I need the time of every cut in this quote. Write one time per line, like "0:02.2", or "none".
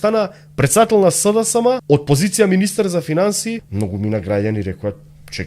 0:01.8
0:03.7